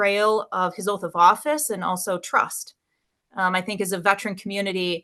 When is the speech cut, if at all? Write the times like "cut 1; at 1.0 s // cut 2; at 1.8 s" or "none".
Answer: none